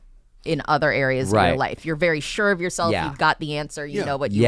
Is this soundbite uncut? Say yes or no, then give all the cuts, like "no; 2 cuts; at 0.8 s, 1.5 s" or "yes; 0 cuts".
yes; 0 cuts